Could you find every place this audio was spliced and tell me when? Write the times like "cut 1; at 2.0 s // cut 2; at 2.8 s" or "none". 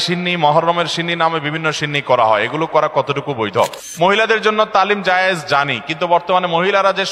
cut 1; at 3.8 s

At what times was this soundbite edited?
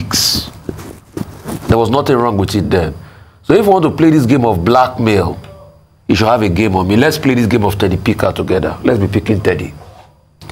none

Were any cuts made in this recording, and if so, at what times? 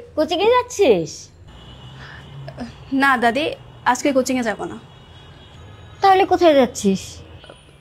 none

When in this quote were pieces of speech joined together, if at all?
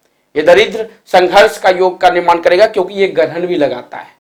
none

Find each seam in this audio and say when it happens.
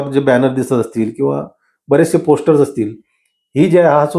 none

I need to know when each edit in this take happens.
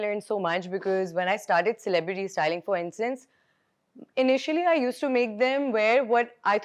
none

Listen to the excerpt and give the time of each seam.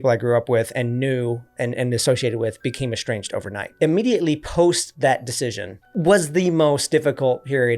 cut 1; at 3.7 s

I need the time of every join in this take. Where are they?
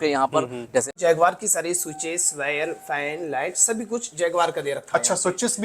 cut 1; at 0.9 s

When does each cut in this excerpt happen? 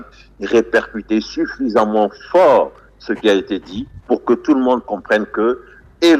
none

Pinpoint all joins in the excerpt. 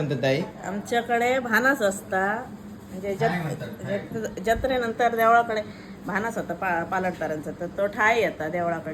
none

